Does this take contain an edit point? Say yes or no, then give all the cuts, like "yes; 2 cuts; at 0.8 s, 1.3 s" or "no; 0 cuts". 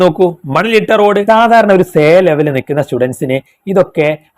yes; 1 cut; at 1.2 s